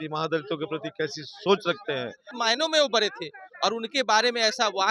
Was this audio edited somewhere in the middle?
yes; 1 cut; at 2.3 s

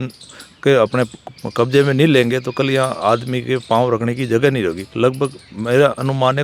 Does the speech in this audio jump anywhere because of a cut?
no; 0 cuts

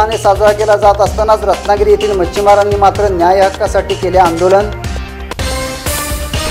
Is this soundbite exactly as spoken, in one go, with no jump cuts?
yes; 0 cuts

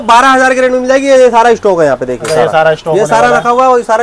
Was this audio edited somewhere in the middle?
no; 0 cuts

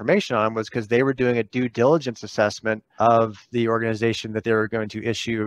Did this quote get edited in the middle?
yes; 1 cut; at 2.9 s

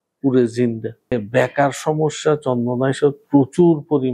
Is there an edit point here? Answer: yes; 1 cut; at 1.1 s

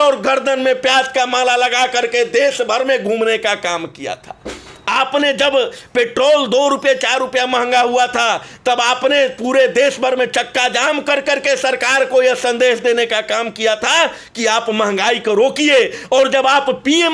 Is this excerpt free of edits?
yes; 0 cuts

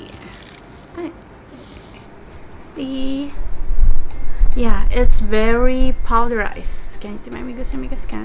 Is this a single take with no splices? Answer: yes; 0 cuts

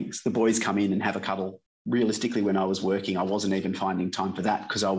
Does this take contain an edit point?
yes; 1 cut; at 1.6 s

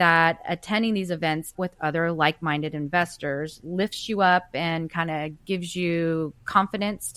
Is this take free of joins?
no; 1 cut; at 1.5 s

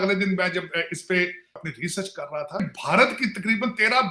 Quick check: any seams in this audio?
yes; 2 cuts; at 1.6 s, 2.6 s

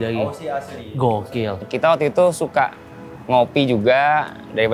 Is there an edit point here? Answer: yes; 1 cut; at 1.6 s

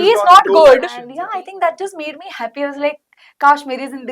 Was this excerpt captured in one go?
no; 1 cut; at 1.1 s

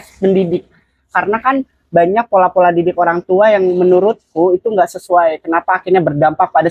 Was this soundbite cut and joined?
no; 0 cuts

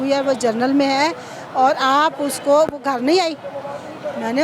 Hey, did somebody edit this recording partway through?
no; 0 cuts

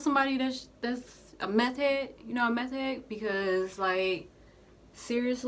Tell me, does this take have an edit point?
no; 0 cuts

